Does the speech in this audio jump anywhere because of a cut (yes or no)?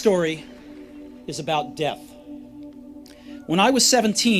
yes